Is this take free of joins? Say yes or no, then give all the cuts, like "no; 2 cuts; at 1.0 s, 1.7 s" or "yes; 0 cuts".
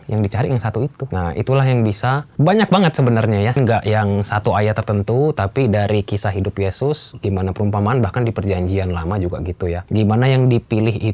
no; 4 cuts; at 1.0 s, 2.3 s, 3.6 s, 9.8 s